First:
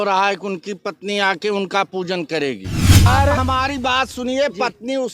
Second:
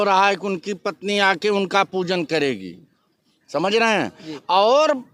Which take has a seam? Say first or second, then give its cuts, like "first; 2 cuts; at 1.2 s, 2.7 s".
first; 1 cut; at 3.1 s